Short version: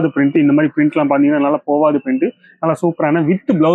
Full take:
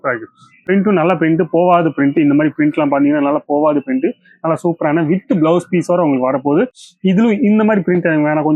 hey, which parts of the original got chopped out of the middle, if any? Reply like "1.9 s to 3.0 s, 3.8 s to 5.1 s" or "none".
none